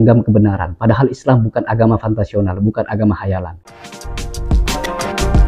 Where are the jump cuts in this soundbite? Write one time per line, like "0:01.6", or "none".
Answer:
0:03.6